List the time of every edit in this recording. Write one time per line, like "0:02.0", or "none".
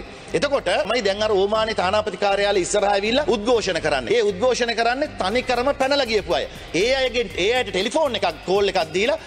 0:00.9
0:03.2
0:04.0

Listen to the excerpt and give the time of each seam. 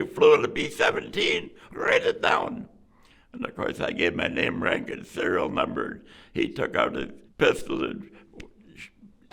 0:07.2

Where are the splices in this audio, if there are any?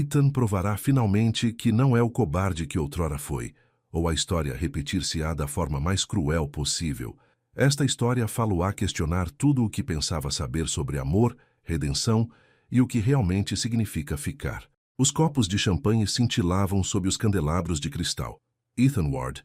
none

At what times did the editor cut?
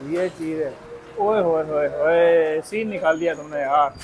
none

